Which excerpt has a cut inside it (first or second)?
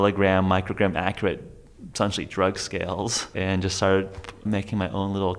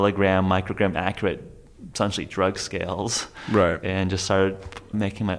first